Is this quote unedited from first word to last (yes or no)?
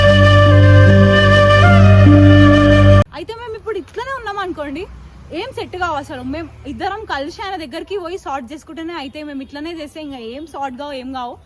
yes